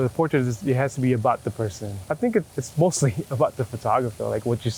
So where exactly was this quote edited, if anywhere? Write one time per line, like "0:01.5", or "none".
0:01.9
0:02.5